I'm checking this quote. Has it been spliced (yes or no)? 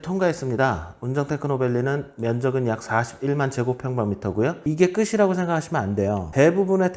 yes